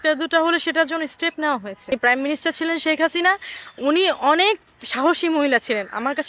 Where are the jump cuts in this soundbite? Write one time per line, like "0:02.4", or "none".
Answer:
0:01.9

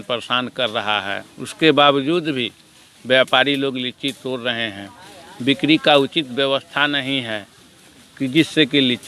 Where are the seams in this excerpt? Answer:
none

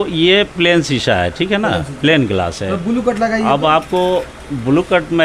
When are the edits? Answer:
none

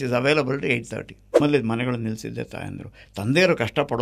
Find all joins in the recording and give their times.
0:01.4

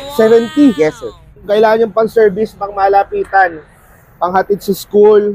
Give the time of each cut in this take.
0:01.4

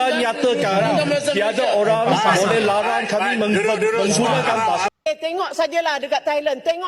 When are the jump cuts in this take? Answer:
0:04.9

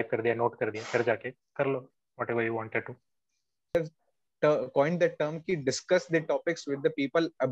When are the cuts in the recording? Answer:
0:03.7

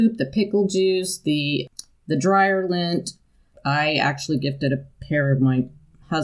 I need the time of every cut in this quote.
0:01.7
0:03.5

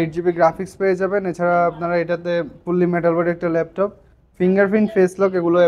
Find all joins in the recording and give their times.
none

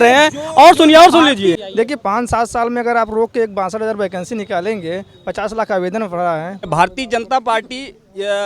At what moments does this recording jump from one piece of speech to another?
0:01.6
0:06.7

